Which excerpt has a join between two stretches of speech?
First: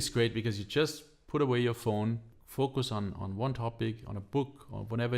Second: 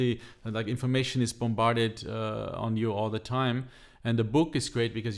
first; 1 cut; at 2.4 s

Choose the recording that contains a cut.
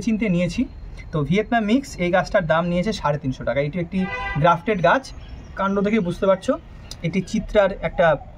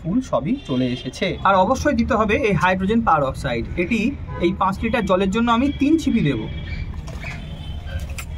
second; 1 cut; at 1.4 s

